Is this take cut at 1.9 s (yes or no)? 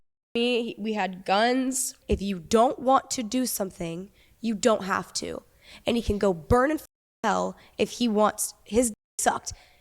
yes